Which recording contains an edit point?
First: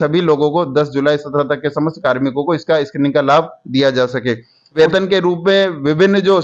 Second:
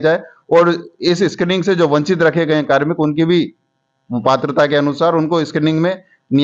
first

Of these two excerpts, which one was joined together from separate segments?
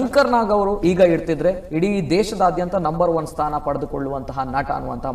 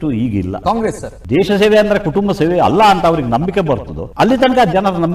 second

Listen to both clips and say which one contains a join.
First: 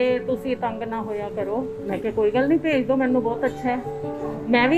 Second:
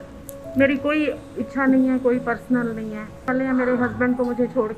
second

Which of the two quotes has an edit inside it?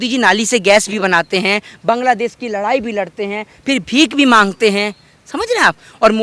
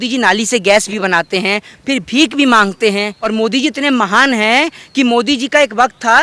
second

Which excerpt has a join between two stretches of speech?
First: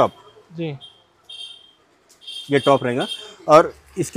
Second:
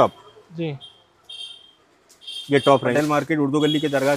second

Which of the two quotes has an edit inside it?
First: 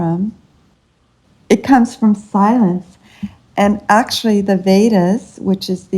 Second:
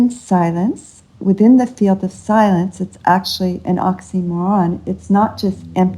first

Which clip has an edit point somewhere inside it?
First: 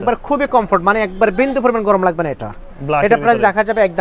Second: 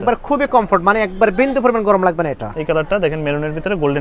second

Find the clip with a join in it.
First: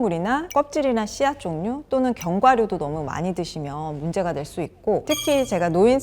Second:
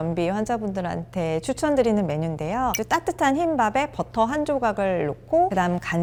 first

